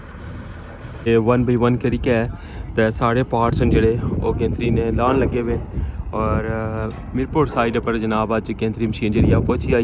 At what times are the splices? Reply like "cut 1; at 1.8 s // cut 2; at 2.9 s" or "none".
cut 1; at 1.1 s